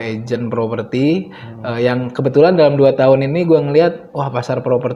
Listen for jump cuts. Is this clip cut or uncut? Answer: uncut